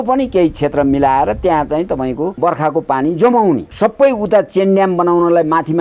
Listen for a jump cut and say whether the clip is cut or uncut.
cut